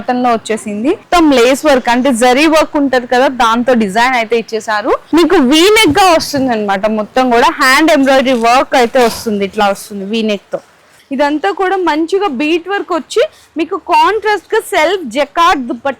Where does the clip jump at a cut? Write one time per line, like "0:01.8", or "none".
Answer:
0:01.0
0:05.0
0:10.9